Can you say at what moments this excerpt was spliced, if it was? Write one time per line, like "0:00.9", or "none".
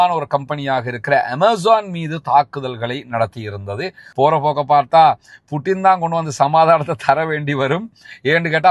0:04.0